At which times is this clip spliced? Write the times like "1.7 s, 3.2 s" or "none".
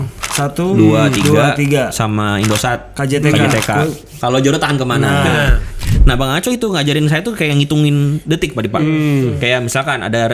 4.1 s, 5.7 s